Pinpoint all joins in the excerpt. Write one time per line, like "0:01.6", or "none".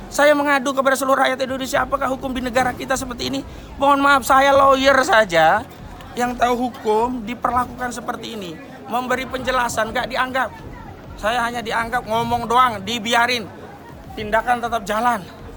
none